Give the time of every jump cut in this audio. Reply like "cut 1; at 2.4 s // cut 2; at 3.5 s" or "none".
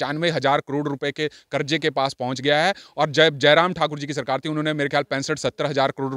none